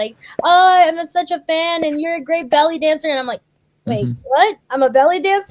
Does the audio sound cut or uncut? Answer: uncut